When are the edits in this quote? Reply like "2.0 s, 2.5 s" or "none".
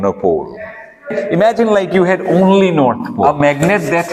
1.1 s, 3.2 s